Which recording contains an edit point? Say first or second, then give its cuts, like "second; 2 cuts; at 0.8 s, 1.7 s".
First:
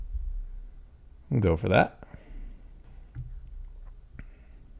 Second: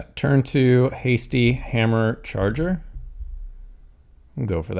first; 1 cut; at 2.8 s